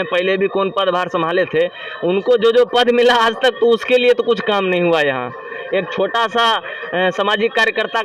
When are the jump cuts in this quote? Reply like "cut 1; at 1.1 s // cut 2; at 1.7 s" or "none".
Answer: none